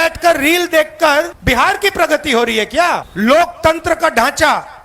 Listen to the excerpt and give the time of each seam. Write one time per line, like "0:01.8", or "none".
0:01.4
0:03.1